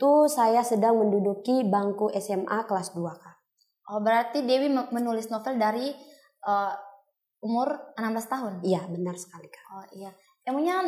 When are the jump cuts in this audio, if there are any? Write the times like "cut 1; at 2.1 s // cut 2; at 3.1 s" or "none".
none